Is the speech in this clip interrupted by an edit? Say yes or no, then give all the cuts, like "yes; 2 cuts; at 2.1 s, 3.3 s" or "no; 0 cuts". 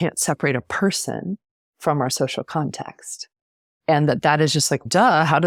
no; 0 cuts